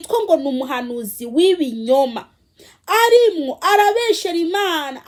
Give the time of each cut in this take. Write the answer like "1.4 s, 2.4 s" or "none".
none